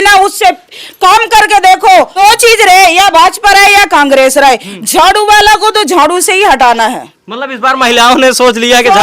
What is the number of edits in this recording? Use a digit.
1